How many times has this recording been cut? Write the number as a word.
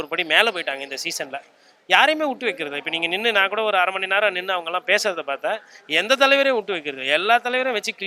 zero